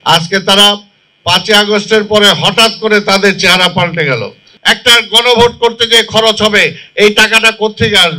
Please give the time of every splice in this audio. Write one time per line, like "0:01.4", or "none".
0:04.5